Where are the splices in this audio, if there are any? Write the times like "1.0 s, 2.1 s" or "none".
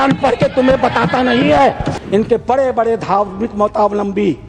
1.9 s